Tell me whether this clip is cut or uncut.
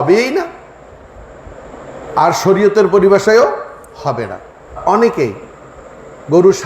cut